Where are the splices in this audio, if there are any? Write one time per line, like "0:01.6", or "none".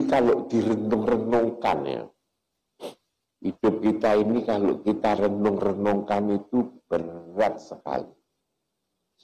none

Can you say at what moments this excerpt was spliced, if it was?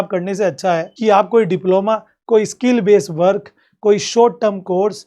0:00.9

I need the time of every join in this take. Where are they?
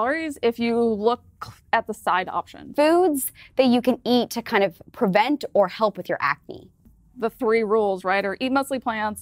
0:02.6
0:06.9

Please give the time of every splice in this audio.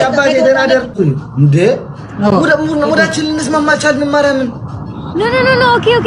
0:00.9

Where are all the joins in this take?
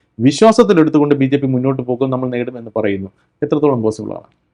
none

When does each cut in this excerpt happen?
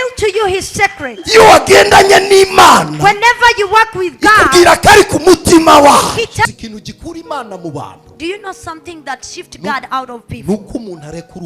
0:06.5

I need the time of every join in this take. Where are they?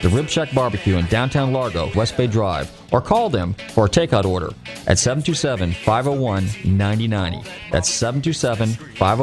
0:01.9

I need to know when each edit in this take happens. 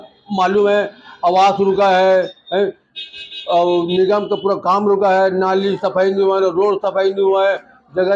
none

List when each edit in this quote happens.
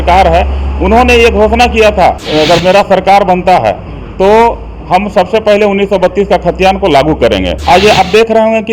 0:02.2
0:07.6

